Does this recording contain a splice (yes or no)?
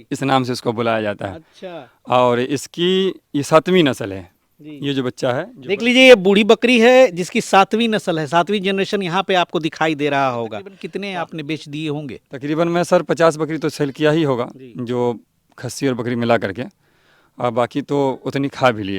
yes